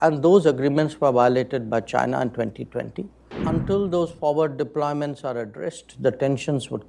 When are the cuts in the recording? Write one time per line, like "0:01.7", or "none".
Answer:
0:03.3